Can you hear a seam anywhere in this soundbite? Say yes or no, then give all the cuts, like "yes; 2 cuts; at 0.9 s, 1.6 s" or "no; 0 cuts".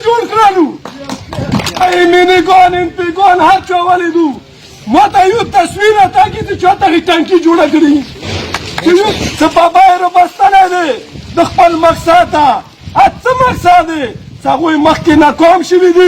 yes; 2 cuts; at 1.8 s, 9.1 s